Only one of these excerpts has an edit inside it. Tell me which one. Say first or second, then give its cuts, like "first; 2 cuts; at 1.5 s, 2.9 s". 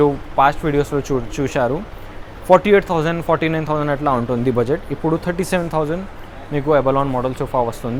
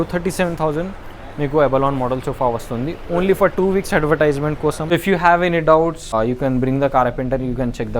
second; 2 cuts; at 4.8 s, 6.1 s